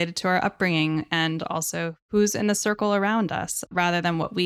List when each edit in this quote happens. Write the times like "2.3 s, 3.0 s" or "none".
2.0 s, 3.6 s